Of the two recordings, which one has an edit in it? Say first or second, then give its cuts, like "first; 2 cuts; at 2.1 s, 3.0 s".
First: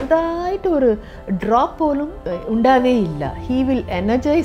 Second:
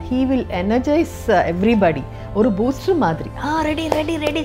first; 1 cut; at 2.2 s